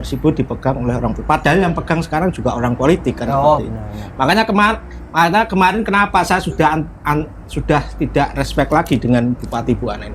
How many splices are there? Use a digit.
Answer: 0